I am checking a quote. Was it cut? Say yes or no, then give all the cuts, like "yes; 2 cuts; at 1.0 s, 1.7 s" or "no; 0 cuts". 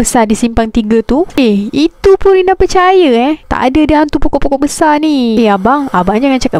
yes; 3 cuts; at 1.3 s, 3.5 s, 5.3 s